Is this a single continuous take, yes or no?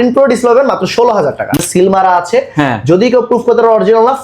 no